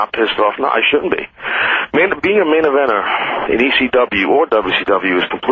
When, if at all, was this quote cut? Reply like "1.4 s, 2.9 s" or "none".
2.1 s